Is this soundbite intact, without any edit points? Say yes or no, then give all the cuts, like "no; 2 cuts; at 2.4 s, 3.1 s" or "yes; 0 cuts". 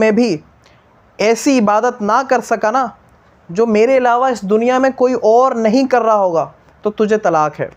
yes; 0 cuts